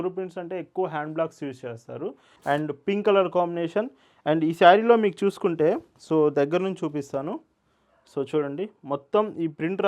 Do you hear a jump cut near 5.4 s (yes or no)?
no